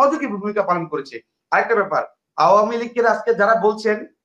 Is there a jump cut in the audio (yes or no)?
no